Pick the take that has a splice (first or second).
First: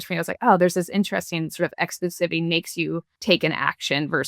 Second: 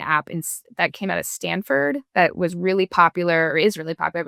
first